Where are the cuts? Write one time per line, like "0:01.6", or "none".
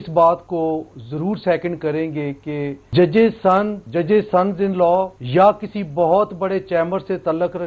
0:02.8
0:03.8
0:05.2